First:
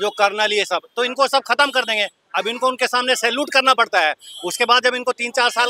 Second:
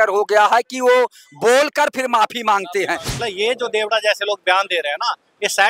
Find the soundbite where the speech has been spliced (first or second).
second